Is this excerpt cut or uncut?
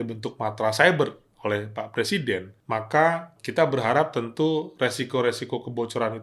cut